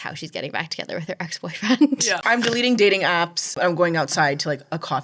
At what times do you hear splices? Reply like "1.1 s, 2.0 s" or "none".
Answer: 2.2 s, 3.6 s